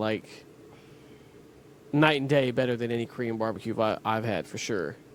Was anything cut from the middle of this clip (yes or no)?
no